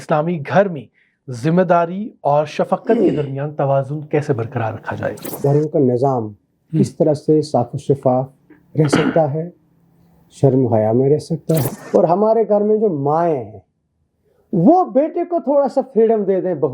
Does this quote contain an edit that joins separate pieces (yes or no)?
yes